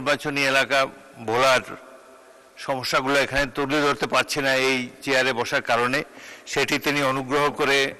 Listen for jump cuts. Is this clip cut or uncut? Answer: uncut